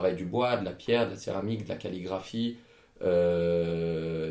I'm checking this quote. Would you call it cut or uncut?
uncut